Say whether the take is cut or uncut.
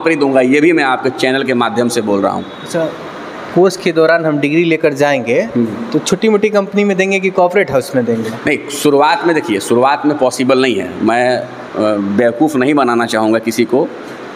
uncut